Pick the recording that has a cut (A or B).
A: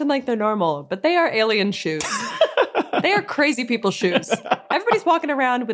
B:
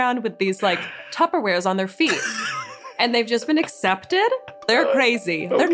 B